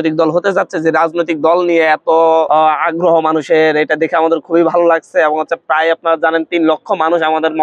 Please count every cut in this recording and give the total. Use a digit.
1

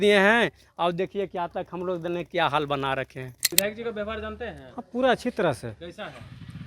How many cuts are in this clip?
1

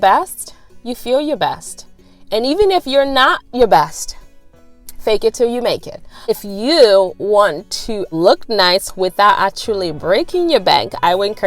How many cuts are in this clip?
2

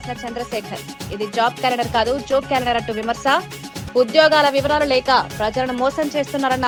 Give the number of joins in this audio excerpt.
0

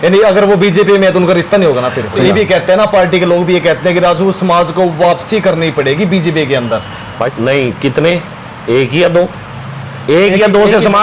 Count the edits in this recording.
2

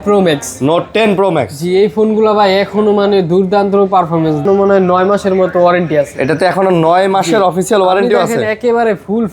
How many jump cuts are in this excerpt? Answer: 1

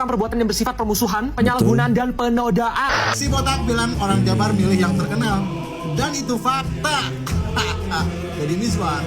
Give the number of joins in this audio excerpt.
1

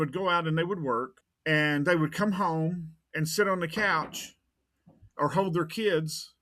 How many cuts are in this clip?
1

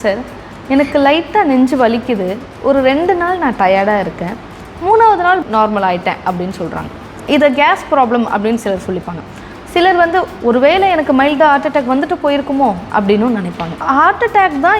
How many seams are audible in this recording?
1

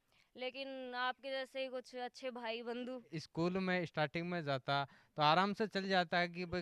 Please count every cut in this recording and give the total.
1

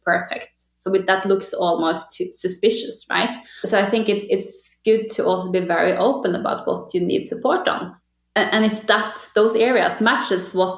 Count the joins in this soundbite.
2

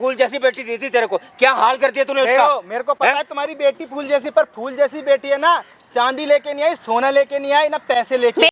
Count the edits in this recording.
0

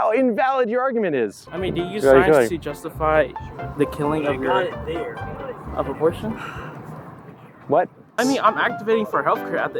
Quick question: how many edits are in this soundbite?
2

